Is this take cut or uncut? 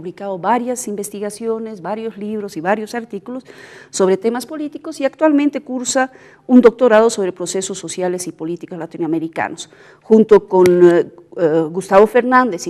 uncut